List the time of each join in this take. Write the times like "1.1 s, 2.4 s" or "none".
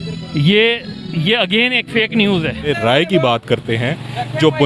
2.7 s